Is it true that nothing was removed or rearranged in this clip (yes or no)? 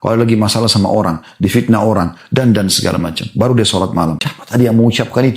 no